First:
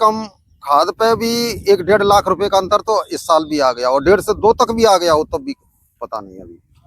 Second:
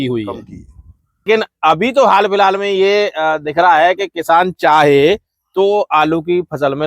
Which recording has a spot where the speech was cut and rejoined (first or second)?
second